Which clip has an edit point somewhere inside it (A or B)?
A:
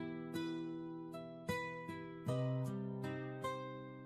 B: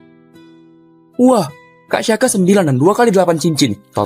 B